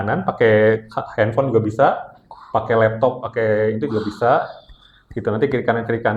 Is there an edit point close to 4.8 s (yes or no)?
no